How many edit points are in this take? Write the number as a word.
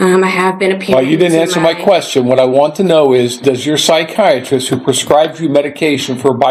zero